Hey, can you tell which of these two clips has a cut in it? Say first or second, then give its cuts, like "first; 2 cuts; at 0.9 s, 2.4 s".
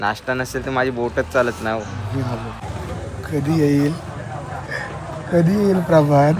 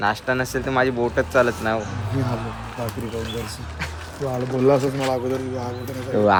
first; 1 cut; at 2.6 s